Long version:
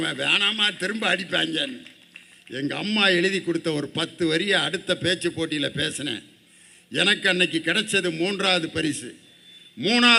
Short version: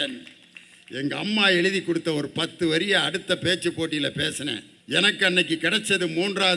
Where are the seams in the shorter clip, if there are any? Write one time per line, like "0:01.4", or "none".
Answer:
0:04.7